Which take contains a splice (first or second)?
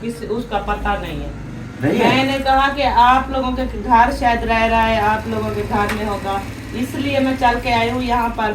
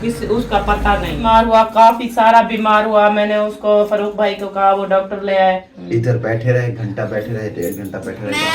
second